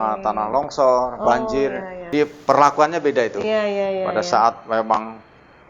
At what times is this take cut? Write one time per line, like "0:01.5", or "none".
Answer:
0:02.1